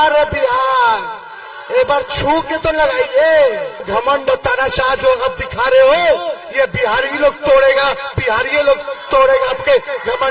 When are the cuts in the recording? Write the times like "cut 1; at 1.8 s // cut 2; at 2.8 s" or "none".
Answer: cut 1; at 3.9 s